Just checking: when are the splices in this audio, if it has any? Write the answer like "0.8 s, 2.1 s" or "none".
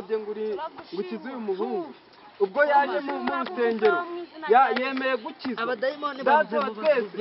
none